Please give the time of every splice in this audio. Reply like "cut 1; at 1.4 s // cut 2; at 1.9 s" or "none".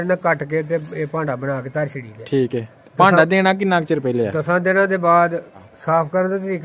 cut 1; at 5.7 s